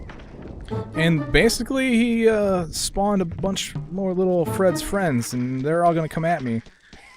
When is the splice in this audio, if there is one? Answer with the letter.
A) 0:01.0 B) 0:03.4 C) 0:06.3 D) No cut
A